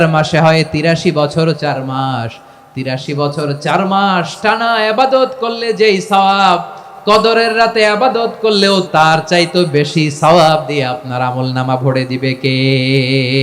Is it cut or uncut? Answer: cut